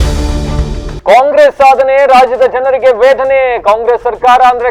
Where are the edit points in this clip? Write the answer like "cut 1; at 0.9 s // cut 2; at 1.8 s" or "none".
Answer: none